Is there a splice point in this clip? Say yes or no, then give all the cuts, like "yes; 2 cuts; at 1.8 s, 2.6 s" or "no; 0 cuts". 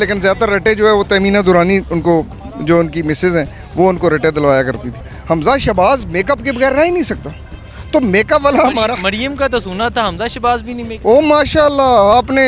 yes; 1 cut; at 5.0 s